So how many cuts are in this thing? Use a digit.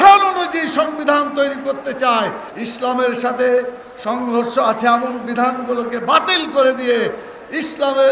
1